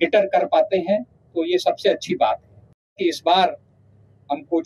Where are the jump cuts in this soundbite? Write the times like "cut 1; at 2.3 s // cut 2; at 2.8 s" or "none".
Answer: cut 1; at 3.0 s